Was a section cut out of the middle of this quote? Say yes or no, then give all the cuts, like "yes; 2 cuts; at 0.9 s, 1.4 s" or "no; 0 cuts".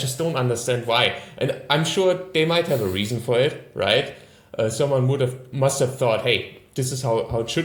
no; 0 cuts